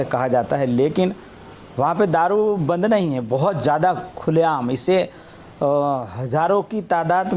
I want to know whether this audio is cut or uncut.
uncut